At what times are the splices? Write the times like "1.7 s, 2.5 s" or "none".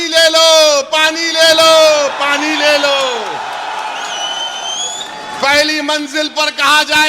none